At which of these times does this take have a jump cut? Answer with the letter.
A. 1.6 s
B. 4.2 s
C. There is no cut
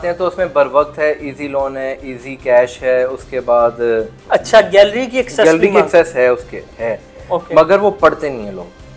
B